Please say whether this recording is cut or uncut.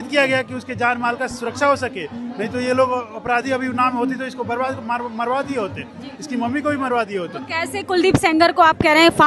uncut